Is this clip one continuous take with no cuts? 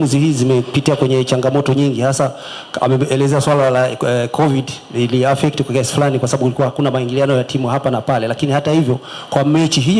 yes; 0 cuts

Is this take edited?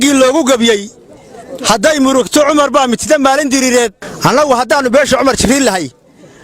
yes; 1 cut; at 4.0 s

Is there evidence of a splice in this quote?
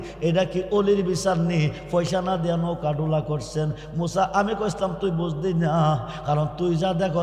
no; 0 cuts

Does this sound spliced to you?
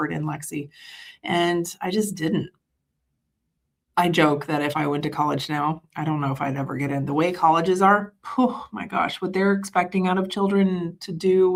no; 0 cuts

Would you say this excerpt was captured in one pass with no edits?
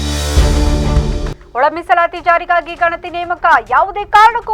no; 1 cut; at 1.4 s

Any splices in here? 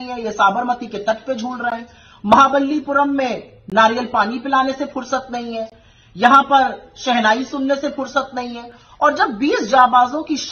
no; 0 cuts

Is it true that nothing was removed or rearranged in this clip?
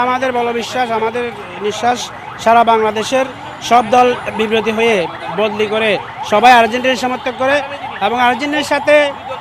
yes; 0 cuts

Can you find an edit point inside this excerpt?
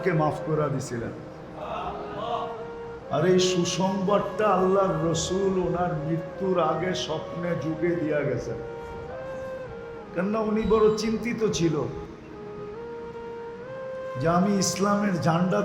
yes; 4 cuts; at 8.6 s, 10.1 s, 12.4 s, 14.1 s

